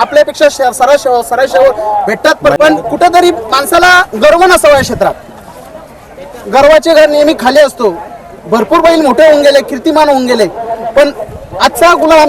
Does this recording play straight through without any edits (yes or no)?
no